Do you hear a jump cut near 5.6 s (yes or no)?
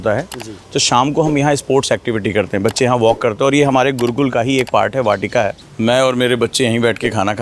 yes